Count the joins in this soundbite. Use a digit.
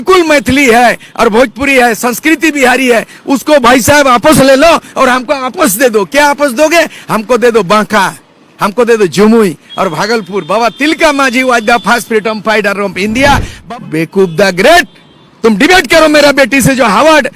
1